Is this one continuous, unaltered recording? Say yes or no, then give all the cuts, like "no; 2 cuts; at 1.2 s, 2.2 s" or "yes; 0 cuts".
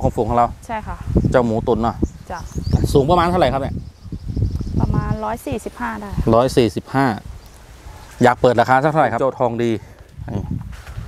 no; 1 cut; at 9.2 s